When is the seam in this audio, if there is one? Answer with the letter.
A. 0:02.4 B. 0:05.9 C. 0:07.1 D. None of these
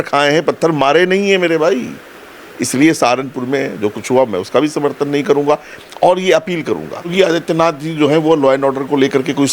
C